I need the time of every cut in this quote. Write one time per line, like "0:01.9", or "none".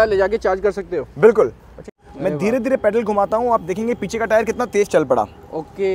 0:01.9